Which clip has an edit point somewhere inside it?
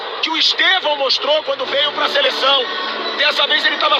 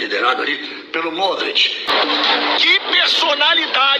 second; 1 cut; at 1.9 s

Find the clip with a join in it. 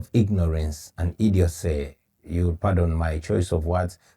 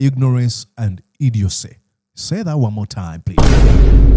first; 1 cut; at 2.1 s

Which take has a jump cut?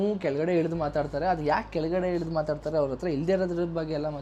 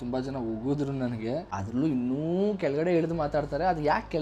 second; 1 cut; at 1.5 s

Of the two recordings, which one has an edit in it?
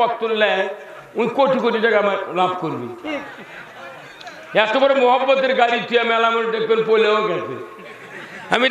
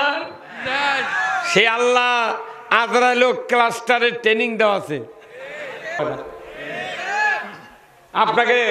second; 1 cut; at 6.0 s

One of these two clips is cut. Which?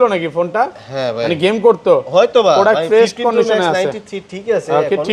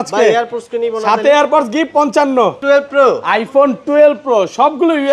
second; 1 cut; at 2.6 s

